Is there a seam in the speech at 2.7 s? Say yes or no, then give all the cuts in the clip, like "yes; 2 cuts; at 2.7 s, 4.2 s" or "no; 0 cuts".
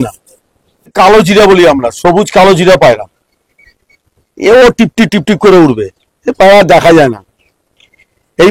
no; 1 cut; at 0.9 s